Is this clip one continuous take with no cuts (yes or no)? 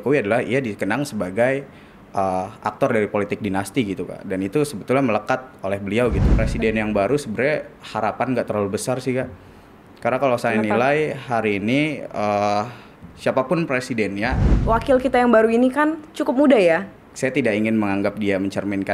no